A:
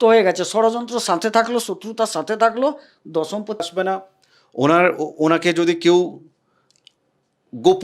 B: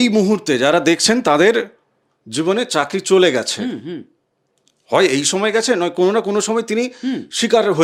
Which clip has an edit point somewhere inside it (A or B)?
A